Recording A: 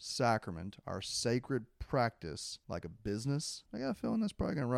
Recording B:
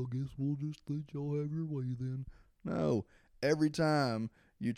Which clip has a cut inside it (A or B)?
A